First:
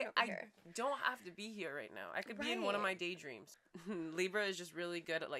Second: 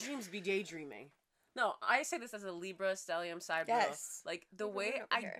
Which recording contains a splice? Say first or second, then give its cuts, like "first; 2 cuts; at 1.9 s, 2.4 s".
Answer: first; 1 cut; at 3.6 s